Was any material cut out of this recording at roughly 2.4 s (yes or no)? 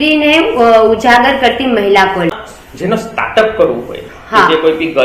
yes